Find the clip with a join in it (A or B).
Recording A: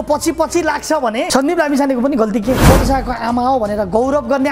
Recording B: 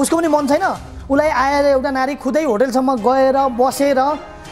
A